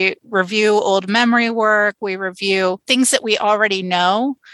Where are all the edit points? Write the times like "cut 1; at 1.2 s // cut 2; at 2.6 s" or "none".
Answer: none